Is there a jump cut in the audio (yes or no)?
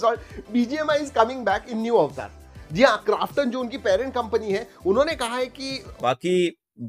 yes